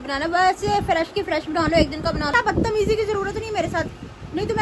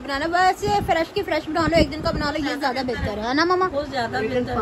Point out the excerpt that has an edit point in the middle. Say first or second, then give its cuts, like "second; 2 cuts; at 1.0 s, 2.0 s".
first; 1 cut; at 2.3 s